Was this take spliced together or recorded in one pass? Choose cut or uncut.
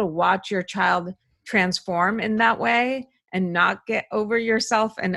uncut